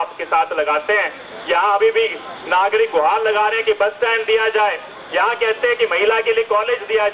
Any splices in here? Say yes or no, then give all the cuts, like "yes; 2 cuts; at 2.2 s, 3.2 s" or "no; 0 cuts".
no; 0 cuts